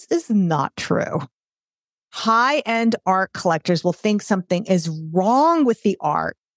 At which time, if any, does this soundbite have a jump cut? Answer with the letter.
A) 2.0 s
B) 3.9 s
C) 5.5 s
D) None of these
A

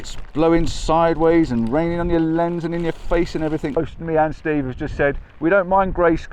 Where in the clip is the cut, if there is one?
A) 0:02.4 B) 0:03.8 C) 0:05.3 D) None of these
B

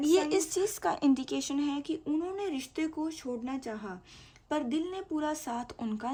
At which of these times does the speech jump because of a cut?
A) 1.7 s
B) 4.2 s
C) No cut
C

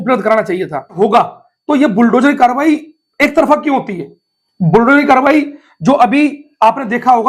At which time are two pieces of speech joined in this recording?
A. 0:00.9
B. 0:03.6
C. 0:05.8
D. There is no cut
A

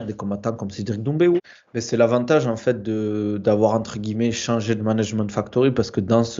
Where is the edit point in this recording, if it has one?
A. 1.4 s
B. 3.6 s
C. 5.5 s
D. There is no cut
A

